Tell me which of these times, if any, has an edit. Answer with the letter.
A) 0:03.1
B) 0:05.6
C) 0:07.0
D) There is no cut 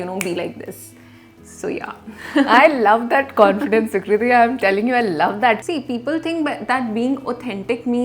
B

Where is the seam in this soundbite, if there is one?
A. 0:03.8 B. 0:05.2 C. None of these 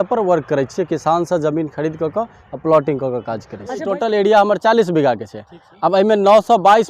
A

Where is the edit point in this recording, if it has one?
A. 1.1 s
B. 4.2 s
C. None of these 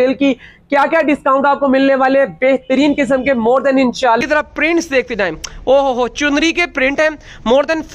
B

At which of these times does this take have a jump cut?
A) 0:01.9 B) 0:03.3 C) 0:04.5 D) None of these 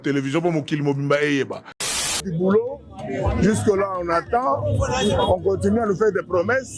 A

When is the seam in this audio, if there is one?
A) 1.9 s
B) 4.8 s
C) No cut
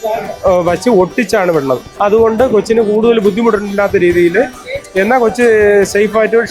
A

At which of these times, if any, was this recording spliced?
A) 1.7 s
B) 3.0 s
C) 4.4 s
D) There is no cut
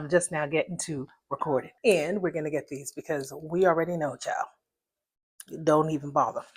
A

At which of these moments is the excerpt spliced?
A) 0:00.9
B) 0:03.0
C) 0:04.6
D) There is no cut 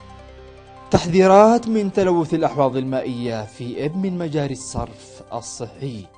A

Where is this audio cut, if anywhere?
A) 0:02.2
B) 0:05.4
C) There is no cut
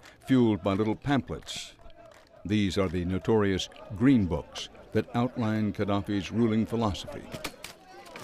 C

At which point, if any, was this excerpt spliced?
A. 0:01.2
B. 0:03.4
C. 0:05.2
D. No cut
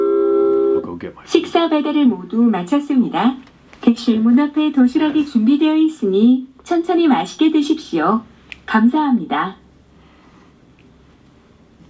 A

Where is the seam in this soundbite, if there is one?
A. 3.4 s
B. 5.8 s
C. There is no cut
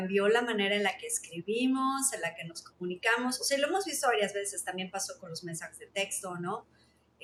C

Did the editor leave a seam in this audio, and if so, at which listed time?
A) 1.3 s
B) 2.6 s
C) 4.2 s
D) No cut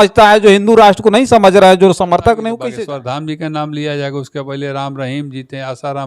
B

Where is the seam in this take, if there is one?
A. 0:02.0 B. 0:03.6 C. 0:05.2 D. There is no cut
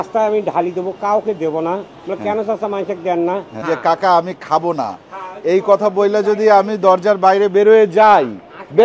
B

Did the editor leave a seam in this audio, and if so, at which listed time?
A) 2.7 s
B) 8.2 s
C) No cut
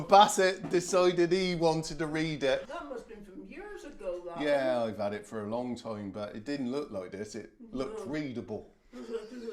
A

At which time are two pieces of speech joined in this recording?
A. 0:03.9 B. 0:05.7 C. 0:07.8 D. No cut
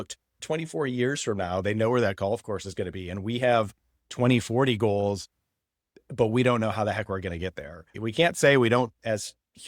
C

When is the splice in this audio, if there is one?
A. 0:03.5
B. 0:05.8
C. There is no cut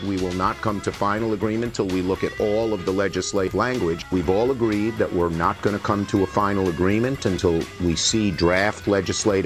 A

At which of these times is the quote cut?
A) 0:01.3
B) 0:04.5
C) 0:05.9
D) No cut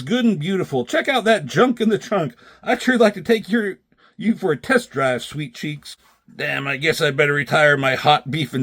C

